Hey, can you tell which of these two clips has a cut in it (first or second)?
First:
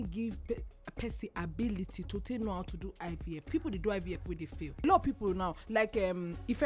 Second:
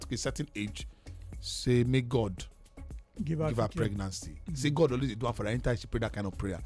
first